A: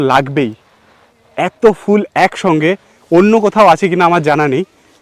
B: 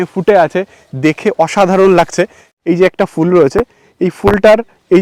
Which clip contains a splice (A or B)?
B